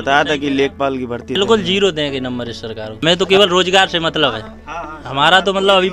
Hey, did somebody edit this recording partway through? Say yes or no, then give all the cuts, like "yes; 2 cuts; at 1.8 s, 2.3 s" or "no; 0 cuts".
yes; 2 cuts; at 1.4 s, 3.0 s